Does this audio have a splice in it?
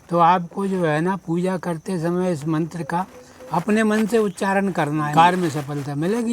yes; 1 cut; at 5.1 s

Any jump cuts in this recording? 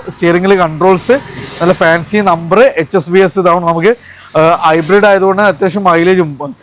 no; 0 cuts

